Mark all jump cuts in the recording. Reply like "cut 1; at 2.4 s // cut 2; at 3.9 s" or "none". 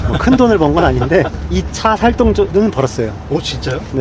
cut 1; at 1.4 s // cut 2; at 2.5 s